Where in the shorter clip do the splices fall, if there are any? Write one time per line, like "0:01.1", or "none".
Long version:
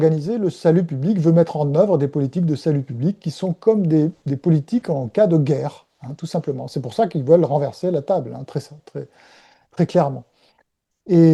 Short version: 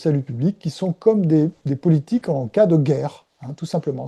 none